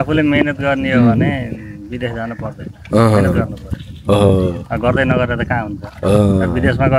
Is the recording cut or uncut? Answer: uncut